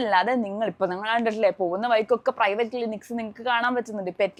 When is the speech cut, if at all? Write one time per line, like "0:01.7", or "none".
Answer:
none